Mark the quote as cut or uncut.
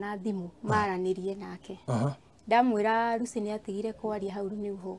uncut